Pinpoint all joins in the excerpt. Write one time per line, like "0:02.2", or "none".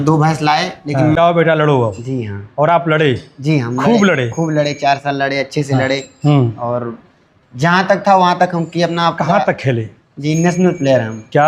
0:01.2